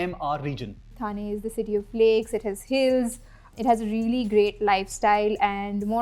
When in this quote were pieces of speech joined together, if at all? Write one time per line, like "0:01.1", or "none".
0:00.9
0:03.5

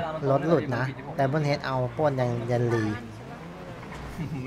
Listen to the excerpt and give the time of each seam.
none

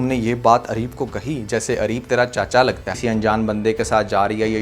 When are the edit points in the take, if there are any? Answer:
0:02.9

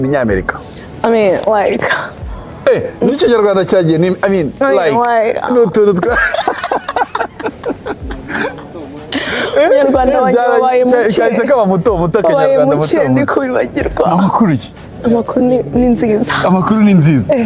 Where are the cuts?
none

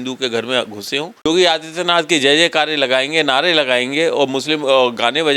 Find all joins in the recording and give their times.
0:01.3

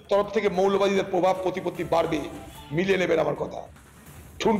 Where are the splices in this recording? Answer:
none

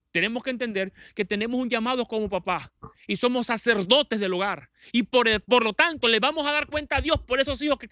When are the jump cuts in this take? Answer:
none

